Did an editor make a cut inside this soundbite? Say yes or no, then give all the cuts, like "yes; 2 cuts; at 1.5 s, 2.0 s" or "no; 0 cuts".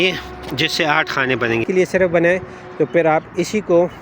yes; 1 cut; at 1.6 s